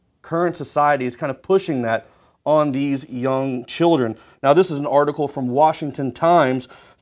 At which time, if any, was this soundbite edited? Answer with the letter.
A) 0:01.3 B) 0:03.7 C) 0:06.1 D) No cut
B